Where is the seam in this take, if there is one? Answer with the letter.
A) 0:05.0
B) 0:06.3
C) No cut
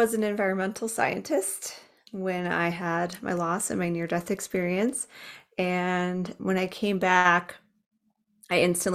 B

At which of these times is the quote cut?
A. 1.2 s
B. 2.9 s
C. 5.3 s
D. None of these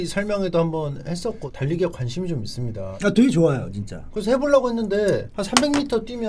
B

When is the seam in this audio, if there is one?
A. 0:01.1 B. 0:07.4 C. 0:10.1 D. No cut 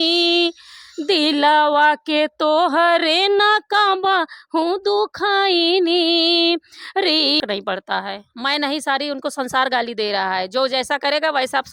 B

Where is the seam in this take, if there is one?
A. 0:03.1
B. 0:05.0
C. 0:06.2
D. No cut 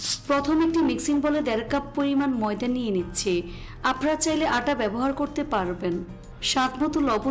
C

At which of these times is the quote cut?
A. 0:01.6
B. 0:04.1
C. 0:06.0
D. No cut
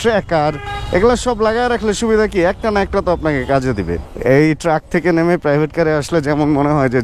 B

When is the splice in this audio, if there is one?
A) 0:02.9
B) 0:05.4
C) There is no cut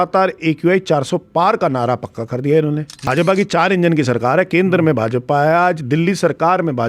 A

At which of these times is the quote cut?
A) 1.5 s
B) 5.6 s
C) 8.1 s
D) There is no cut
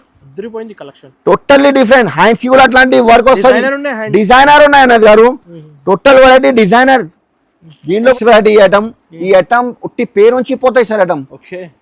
C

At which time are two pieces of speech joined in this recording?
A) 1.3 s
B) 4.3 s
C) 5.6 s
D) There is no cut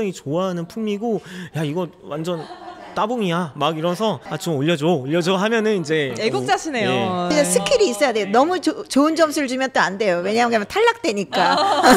B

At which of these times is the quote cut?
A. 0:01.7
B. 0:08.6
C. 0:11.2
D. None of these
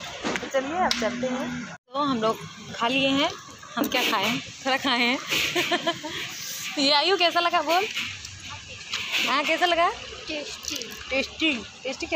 A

